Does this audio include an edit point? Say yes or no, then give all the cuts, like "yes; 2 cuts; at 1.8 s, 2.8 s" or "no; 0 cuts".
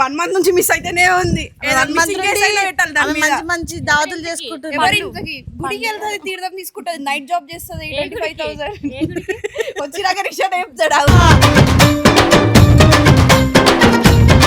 no; 0 cuts